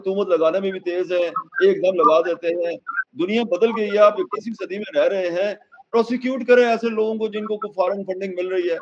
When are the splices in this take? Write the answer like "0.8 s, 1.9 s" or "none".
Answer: none

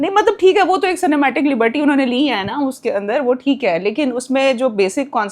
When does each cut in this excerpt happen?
none

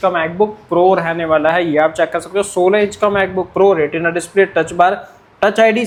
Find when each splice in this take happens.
none

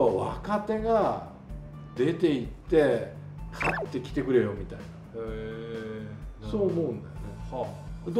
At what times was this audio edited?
none

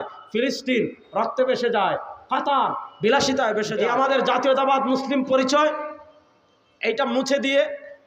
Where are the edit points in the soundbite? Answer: 3.7 s

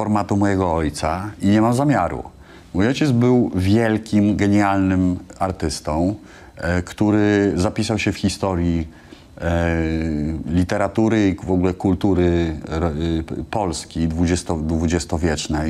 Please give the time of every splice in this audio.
none

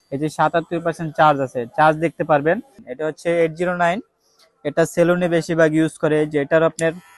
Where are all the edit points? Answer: 2.9 s

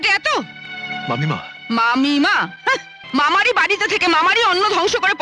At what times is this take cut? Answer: 2.9 s

